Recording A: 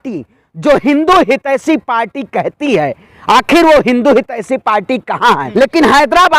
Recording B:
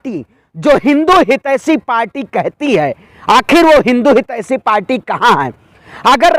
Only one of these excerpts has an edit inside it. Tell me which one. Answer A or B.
A